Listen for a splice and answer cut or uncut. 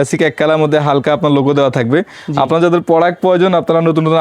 cut